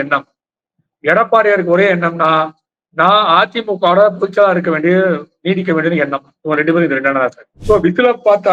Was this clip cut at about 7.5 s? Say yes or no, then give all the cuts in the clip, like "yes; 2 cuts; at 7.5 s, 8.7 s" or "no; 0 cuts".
yes; 1 cut; at 7.5 s